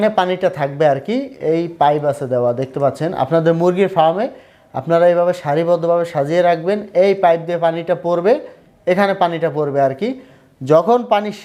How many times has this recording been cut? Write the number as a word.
zero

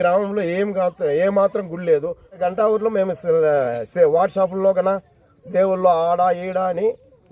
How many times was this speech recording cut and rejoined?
one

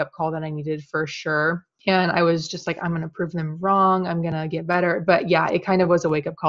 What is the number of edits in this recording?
one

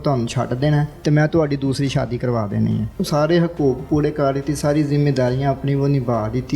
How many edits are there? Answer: two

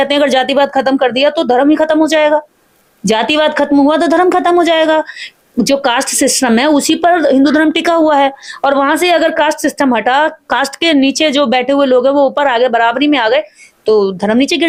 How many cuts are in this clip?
zero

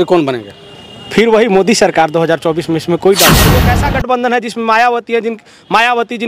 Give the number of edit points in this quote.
one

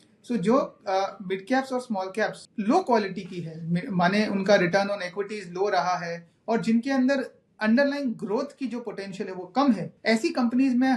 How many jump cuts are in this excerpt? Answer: two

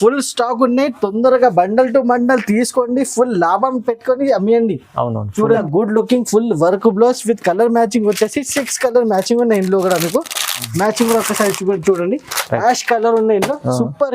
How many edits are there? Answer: one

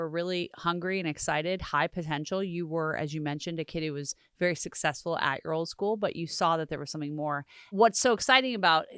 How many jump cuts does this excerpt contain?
one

